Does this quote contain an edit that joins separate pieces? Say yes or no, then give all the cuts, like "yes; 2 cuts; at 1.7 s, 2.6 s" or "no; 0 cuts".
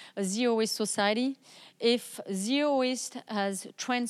no; 0 cuts